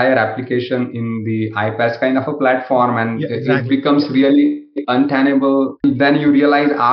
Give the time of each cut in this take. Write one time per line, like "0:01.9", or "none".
0:05.8